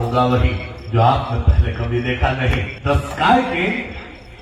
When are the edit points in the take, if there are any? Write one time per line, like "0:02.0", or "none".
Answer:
0:02.7